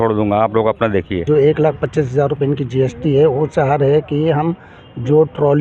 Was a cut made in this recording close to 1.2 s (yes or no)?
yes